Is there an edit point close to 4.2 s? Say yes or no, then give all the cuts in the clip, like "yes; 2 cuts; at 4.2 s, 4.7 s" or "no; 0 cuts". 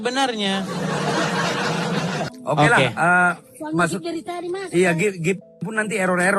no; 1 cut; at 2.3 s